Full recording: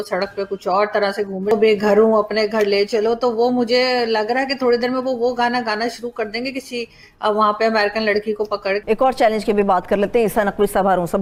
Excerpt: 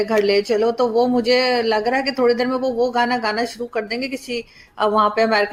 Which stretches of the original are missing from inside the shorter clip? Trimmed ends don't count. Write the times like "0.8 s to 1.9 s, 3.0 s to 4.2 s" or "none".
none